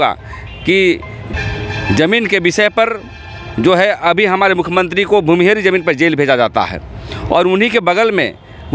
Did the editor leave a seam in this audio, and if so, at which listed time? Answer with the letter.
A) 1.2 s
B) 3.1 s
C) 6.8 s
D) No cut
A